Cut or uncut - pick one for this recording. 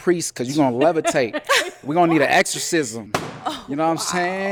uncut